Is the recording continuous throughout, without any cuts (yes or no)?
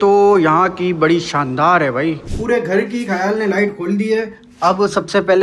no